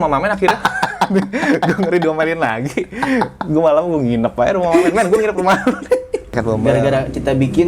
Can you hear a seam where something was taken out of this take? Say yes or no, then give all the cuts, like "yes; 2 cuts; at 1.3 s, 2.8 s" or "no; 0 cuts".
yes; 1 cut; at 6.4 s